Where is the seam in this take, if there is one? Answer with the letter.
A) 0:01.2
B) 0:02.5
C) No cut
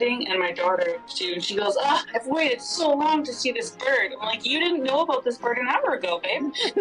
A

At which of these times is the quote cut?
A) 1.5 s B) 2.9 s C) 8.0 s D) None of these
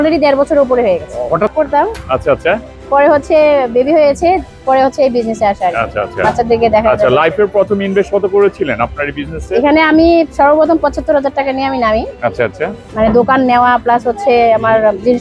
A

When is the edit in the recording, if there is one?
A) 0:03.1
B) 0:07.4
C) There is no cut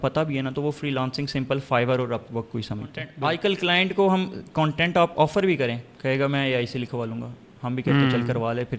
A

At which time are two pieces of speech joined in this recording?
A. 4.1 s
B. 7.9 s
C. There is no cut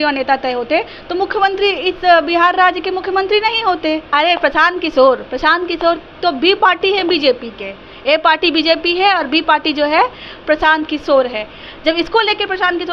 A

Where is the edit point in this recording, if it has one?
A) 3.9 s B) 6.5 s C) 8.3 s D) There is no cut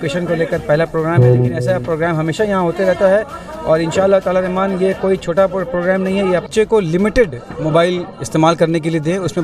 B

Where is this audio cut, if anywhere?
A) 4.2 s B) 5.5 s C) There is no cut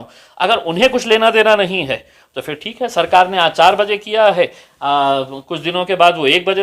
C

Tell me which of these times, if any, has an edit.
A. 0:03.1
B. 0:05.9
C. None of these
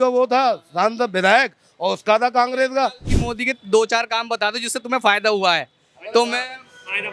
A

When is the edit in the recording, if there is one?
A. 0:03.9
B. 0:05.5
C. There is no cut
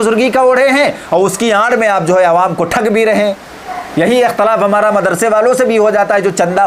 C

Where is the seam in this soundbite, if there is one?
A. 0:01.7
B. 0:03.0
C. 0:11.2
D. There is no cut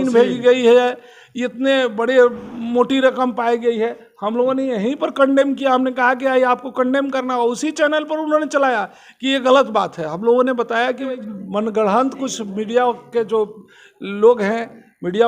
C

